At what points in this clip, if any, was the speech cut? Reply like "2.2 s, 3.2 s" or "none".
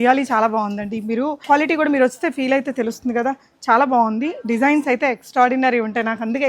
1.4 s